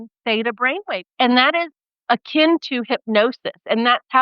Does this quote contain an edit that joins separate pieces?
yes; 1 cut; at 1.1 s

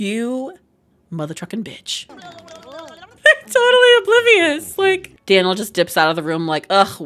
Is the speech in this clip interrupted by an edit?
yes; 2 cuts; at 2.1 s, 5.1 s

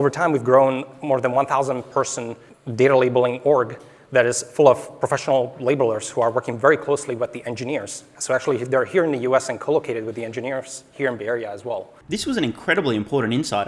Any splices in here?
no; 0 cuts

